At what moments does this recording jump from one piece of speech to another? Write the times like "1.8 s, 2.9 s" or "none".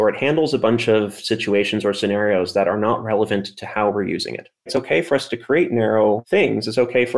4.7 s, 6.2 s